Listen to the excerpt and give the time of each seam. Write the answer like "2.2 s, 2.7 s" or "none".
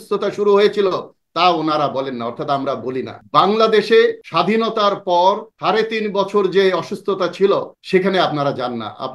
3.2 s, 4.2 s, 5.5 s, 7.7 s